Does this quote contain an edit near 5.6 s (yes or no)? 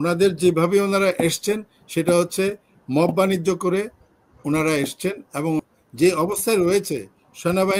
yes